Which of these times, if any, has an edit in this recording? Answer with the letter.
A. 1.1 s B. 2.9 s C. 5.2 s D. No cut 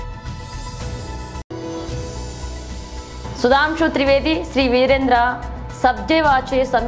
A